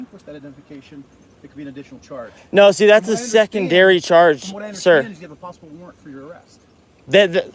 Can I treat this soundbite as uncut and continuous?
yes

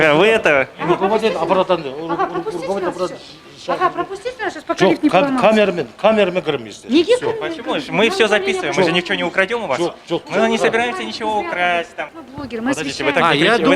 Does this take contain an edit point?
yes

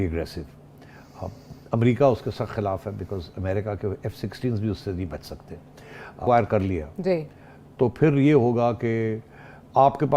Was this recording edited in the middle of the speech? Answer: yes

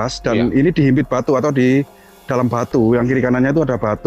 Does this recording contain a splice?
no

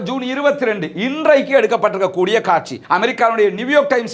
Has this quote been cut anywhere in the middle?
yes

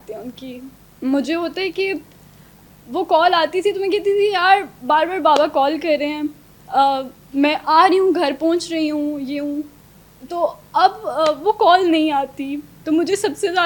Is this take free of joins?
yes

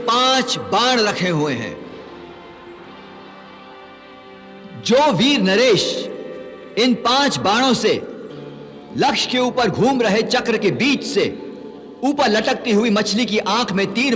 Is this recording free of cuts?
yes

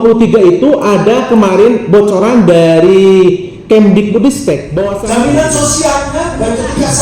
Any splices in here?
yes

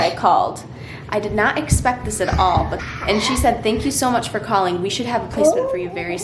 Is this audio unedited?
no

